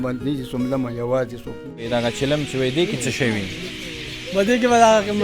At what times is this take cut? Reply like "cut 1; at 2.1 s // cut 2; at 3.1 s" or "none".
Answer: cut 1; at 1.9 s